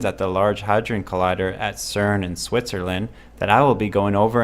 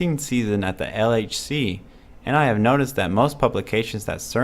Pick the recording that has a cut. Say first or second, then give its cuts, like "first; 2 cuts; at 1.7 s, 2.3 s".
second; 1 cut; at 3.2 s